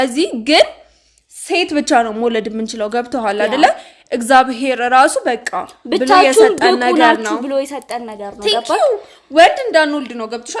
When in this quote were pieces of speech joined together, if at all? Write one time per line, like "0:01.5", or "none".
none